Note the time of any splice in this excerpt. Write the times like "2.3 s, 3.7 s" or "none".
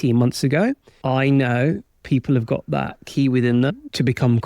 0.9 s, 3.7 s